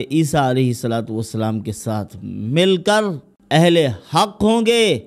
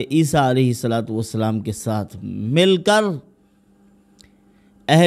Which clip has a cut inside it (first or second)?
first